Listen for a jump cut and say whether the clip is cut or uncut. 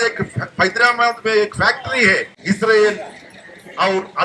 cut